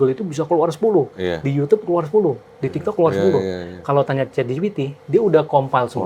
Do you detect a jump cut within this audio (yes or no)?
no